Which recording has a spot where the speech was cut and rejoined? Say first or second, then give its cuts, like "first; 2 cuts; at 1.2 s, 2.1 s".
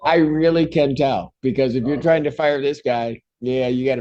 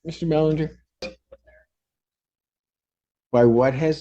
second; 1 cut; at 1.0 s